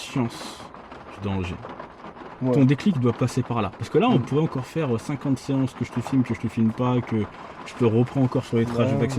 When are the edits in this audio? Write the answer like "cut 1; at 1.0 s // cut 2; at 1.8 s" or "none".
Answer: none

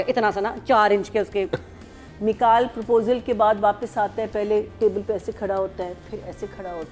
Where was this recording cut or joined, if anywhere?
cut 1; at 1.9 s

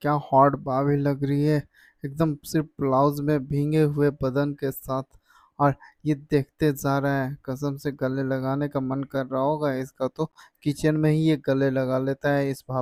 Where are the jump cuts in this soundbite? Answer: none

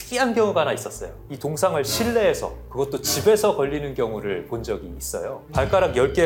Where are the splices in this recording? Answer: cut 1; at 1.2 s // cut 2; at 5.4 s

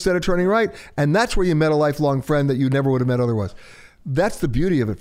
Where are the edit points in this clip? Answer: none

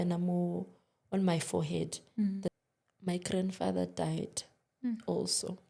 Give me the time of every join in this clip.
cut 1; at 2.5 s

